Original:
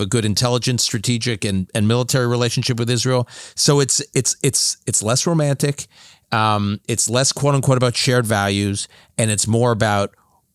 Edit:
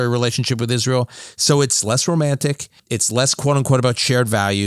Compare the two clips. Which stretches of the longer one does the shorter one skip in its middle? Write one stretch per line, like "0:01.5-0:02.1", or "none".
0:04.0-0:05.0
0:06.0-0:06.8